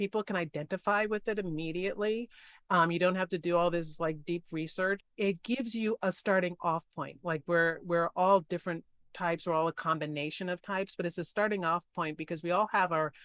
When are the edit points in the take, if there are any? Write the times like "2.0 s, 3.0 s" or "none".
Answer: 5.1 s